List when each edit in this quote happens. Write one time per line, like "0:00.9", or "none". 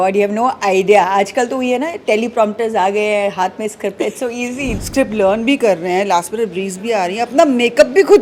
0:04.7